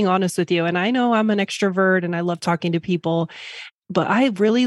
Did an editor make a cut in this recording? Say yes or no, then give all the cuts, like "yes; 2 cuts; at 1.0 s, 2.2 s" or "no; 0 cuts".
yes; 1 cut; at 3.7 s